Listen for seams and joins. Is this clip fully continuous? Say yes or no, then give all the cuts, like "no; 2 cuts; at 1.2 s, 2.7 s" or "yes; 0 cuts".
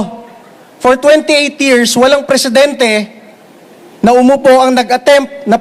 yes; 0 cuts